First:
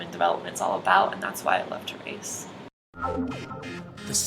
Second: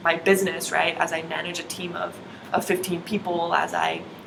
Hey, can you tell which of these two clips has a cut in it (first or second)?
first